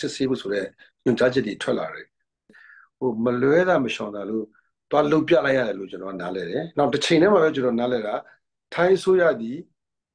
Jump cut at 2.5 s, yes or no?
yes